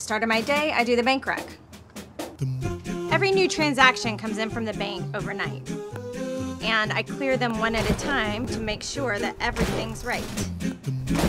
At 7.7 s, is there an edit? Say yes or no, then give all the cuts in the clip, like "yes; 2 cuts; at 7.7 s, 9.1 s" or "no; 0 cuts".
no; 0 cuts